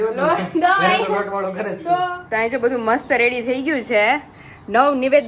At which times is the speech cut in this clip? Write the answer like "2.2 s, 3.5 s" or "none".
2.2 s